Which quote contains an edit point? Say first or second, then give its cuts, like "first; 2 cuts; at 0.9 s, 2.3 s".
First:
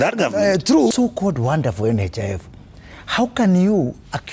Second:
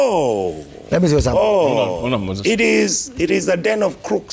first; 1 cut; at 0.9 s